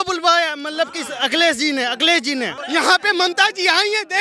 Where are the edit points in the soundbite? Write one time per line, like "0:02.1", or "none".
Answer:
0:02.6